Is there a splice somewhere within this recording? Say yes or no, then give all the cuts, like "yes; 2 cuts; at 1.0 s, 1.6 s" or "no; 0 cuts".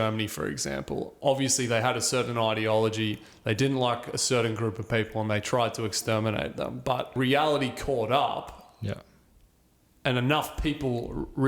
yes; 1 cut; at 7.1 s